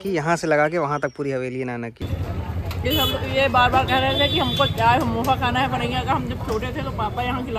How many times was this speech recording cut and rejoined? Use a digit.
1